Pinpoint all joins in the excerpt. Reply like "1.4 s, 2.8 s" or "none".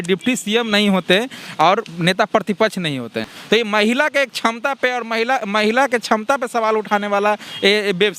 3.3 s